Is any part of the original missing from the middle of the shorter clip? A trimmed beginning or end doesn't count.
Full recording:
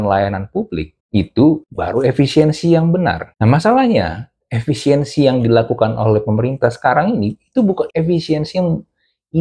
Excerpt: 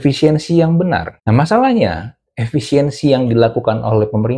no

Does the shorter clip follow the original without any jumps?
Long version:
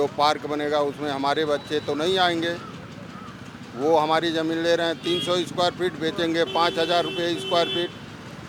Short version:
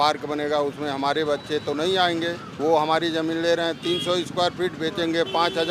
no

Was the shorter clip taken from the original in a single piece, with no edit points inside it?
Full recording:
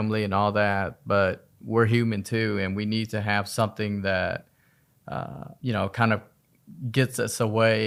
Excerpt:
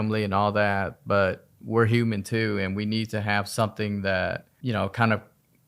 no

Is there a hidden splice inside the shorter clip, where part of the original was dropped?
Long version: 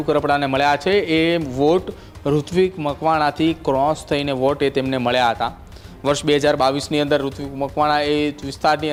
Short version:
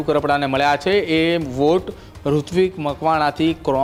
no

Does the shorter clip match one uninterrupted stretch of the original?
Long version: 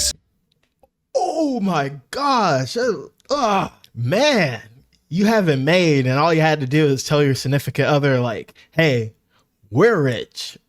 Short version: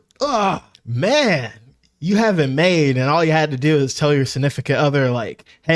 yes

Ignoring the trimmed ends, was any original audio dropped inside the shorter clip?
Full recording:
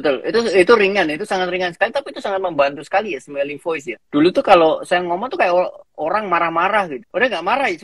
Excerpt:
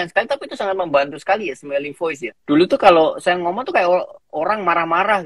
no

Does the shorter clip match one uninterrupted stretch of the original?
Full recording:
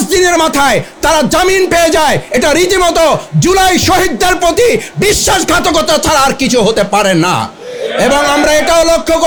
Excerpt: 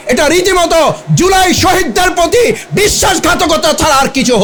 yes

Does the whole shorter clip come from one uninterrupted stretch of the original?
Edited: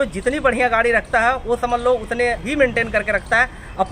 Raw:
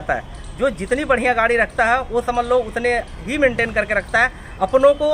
no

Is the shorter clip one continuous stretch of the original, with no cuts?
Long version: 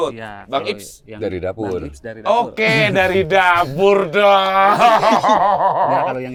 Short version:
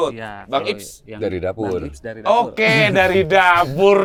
yes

